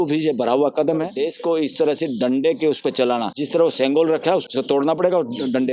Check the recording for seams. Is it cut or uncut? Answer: cut